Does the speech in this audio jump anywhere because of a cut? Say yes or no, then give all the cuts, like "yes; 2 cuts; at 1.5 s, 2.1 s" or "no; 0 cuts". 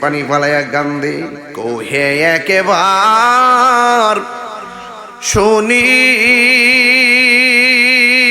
yes; 1 cut; at 1.4 s